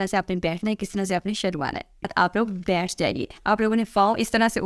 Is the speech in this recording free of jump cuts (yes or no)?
no